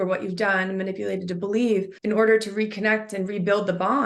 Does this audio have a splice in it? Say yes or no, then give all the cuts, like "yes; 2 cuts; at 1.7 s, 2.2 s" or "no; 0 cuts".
yes; 1 cut; at 1.9 s